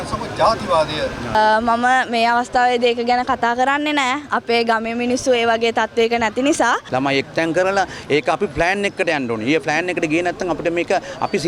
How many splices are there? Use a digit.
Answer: 2